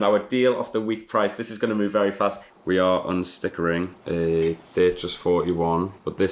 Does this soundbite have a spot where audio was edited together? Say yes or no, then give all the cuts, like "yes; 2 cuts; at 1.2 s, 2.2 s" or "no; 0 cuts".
yes; 2 cuts; at 2.5 s, 4.0 s